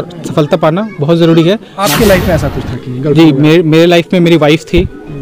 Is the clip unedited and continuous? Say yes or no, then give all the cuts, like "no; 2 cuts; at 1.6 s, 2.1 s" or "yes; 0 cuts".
no; 1 cut; at 1.7 s